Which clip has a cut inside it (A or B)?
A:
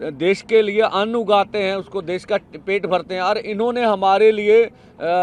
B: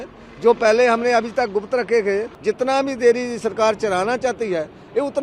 B